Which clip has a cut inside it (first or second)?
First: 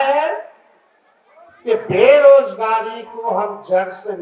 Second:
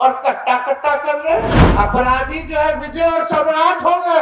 second